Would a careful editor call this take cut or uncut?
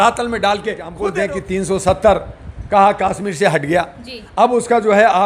cut